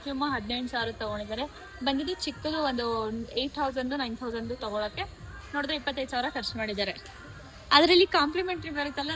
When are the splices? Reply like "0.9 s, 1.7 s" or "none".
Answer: none